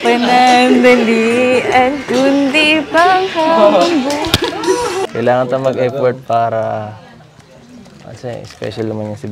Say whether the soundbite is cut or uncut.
cut